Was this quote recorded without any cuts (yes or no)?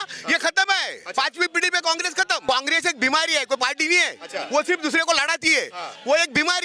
no